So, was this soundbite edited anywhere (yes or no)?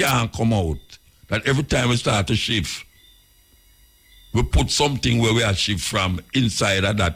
no